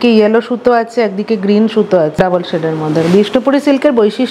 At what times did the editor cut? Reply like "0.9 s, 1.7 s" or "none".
2.2 s